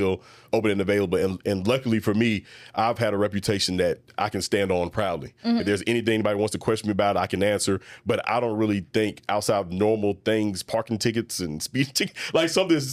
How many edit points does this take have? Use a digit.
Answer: 0